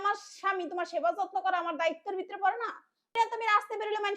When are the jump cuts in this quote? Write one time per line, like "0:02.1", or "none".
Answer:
0:03.1

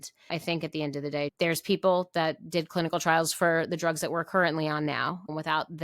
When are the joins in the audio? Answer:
0:01.3

